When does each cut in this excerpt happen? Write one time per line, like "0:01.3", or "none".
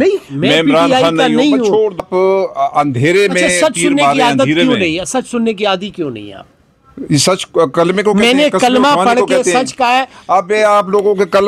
0:02.0